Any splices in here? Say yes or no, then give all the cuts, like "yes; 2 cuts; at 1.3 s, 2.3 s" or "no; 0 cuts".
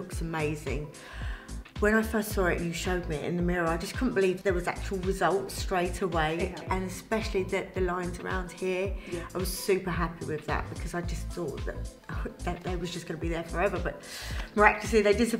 yes; 2 cuts; at 4.4 s, 6.6 s